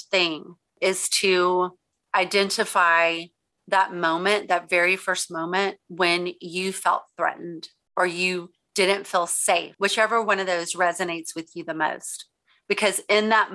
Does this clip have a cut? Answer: yes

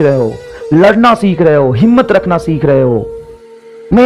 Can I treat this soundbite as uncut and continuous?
yes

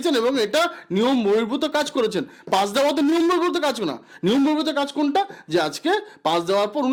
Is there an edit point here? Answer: no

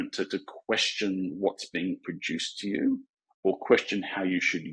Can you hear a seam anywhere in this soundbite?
no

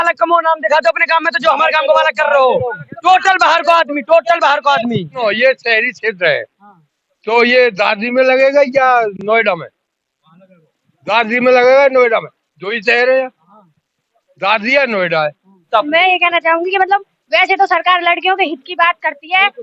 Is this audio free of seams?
no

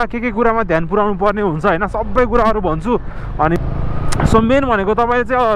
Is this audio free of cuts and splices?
no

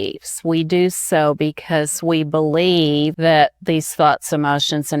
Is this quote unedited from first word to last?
no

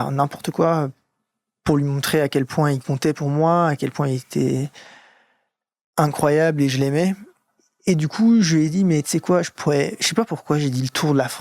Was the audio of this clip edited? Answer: yes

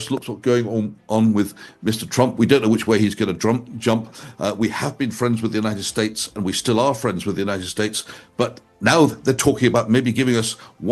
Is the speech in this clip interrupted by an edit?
no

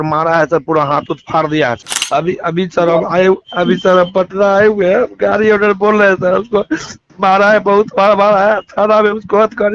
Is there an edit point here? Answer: no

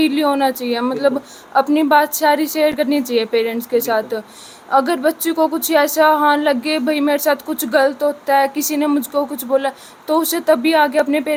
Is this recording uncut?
yes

